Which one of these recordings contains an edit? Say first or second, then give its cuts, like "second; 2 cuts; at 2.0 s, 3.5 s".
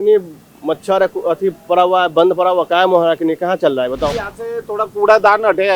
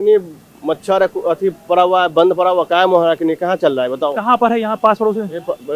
first; 1 cut; at 4.1 s